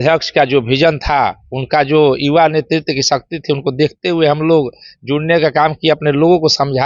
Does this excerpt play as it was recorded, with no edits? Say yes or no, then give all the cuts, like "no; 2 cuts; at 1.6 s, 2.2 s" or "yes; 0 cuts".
yes; 0 cuts